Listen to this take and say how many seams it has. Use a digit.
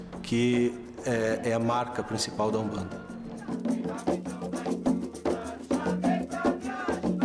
1